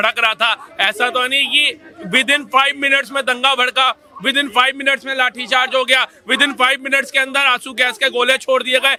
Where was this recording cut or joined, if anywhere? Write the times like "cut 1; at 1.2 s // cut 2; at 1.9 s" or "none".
none